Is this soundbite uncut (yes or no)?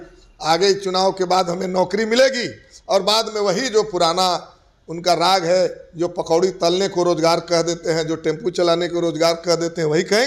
yes